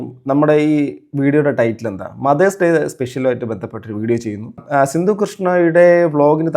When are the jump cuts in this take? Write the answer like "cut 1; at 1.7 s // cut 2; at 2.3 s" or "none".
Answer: cut 1; at 4.6 s